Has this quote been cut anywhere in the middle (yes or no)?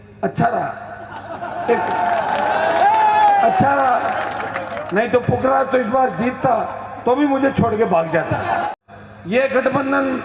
yes